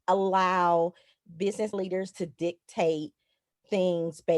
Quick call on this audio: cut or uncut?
cut